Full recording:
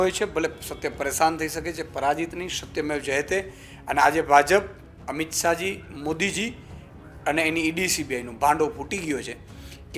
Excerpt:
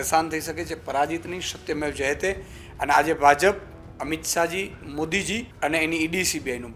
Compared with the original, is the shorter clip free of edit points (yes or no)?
no